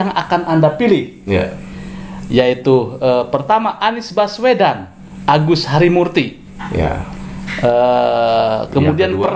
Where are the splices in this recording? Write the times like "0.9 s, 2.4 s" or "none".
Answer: none